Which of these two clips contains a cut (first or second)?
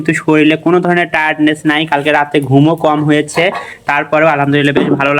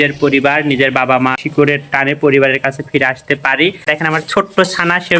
second